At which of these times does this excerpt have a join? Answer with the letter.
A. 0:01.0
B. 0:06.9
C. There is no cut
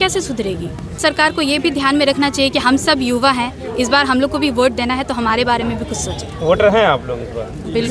A